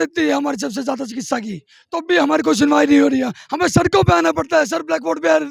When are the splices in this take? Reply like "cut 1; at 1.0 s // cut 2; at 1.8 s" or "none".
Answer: none